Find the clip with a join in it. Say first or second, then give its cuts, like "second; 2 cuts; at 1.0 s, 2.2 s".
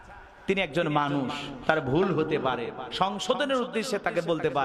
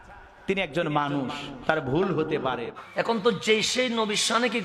second; 1 cut; at 2.8 s